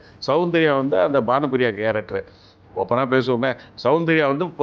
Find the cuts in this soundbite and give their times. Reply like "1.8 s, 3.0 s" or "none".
2.6 s

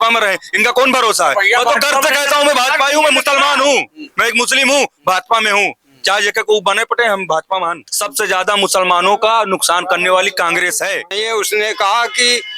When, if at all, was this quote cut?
7.9 s, 11.1 s

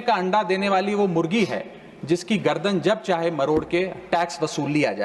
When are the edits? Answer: none

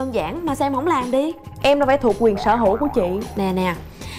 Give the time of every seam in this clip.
none

